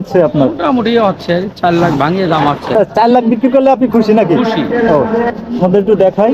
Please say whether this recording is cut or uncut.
cut